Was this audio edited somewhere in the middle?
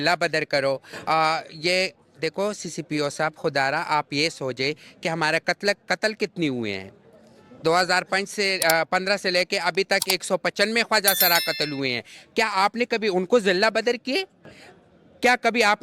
no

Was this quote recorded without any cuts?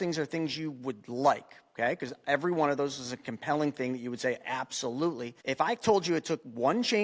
no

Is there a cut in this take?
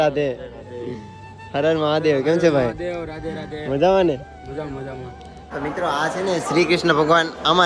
yes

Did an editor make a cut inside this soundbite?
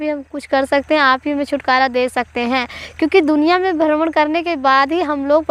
no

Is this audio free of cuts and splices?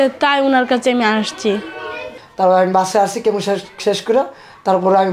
no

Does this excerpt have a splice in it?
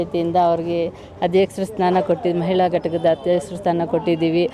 no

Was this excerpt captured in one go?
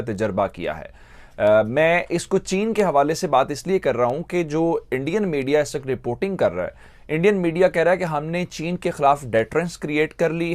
yes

